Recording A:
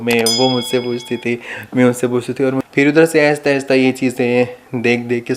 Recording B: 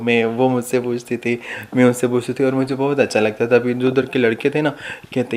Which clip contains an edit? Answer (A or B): A